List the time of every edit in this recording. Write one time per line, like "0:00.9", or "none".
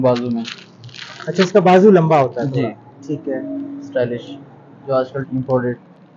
0:05.2